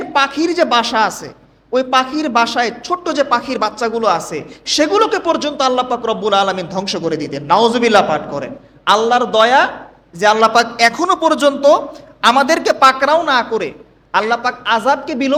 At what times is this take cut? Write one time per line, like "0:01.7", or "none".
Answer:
none

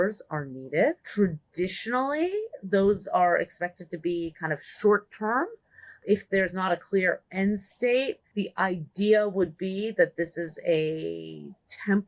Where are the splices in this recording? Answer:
0:01.0
0:06.0
0:08.2

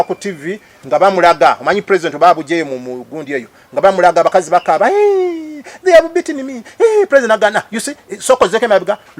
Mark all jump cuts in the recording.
none

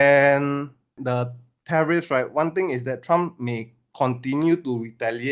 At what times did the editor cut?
0:01.0

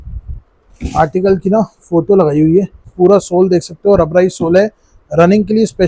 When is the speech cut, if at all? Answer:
0:02.8

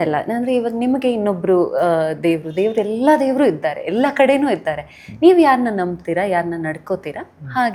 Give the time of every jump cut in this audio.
none

